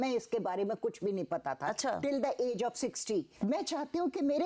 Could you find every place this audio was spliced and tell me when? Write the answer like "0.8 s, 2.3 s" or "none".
3.3 s